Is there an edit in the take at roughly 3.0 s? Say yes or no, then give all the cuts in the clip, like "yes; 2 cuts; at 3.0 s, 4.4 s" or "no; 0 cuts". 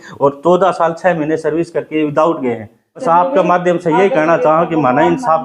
yes; 1 cut; at 3.0 s